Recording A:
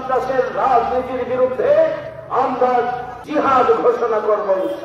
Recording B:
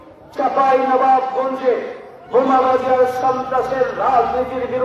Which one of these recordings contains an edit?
A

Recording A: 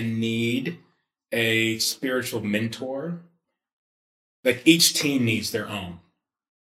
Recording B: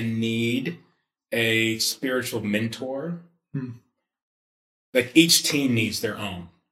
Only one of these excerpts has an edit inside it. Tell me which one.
A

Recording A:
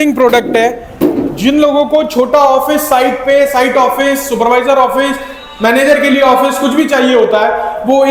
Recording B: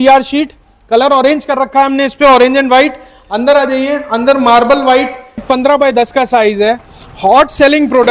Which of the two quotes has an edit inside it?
B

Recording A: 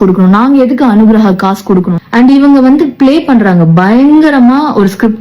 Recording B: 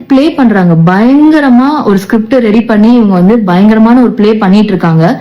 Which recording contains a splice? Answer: A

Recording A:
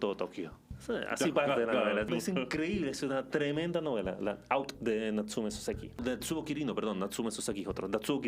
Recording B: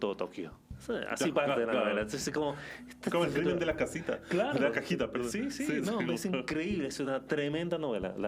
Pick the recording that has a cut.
A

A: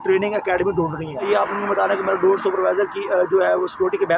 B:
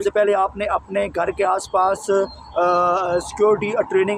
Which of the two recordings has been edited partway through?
A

